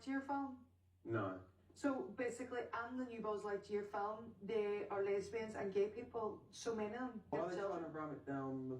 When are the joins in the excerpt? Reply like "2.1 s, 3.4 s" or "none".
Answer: 7.3 s